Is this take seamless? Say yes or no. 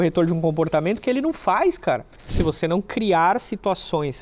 no